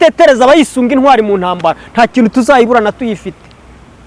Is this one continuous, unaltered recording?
yes; 0 cuts

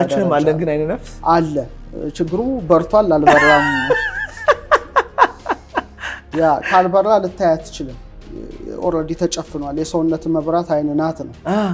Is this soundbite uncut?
yes; 0 cuts

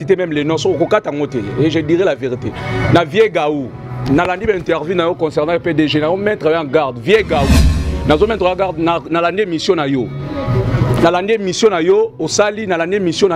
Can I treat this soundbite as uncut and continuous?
yes; 0 cuts

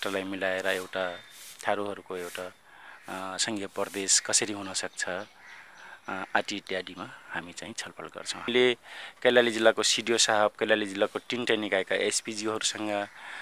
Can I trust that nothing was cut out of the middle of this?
no; 1 cut; at 8.5 s

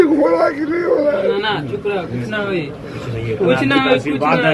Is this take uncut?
yes; 0 cuts

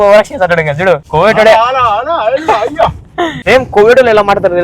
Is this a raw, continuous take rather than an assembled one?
no; 2 cuts; at 1.1 s, 3.4 s

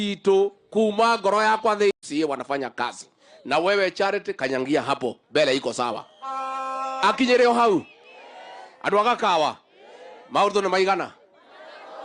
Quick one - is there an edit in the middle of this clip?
yes; 1 cut; at 2.0 s

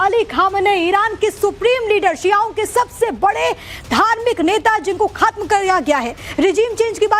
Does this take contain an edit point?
yes; 1 cut; at 2.5 s

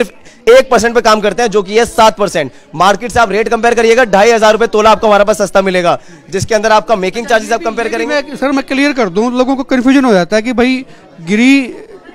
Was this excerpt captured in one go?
yes; 0 cuts

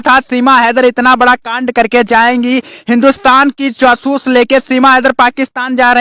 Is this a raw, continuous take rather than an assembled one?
yes; 0 cuts

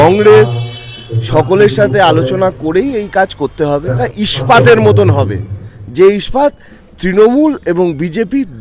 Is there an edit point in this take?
yes; 1 cut; at 4.0 s

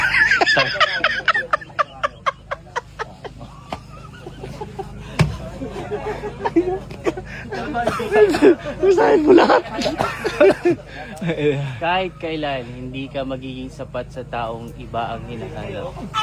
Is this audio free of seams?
yes; 0 cuts

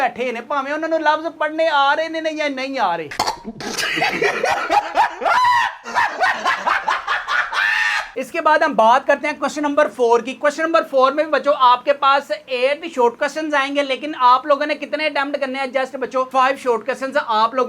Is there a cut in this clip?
no; 0 cuts

